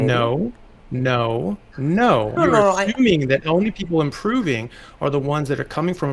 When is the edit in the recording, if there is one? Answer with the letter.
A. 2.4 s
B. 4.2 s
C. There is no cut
A